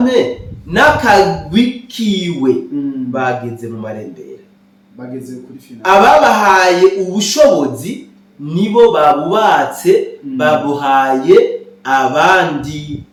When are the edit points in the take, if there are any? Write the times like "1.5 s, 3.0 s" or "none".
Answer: none